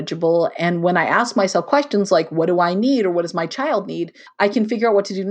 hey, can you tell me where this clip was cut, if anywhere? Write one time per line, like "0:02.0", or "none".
0:04.2